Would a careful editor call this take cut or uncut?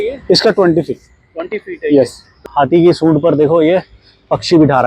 cut